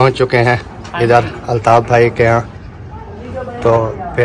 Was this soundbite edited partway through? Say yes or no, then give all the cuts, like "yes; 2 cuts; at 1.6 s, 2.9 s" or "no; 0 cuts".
no; 0 cuts